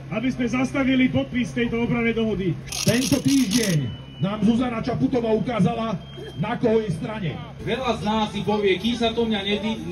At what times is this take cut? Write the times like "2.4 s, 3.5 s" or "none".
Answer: 2.6 s, 7.5 s